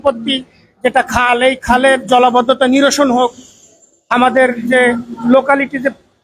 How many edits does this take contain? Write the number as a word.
zero